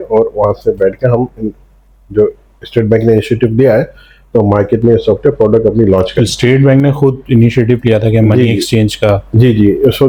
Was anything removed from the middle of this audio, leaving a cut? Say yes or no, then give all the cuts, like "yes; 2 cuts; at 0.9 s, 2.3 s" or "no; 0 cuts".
no; 0 cuts